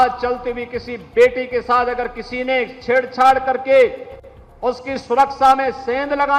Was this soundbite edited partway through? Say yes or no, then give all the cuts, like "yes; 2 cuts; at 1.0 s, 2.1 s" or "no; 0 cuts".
no; 0 cuts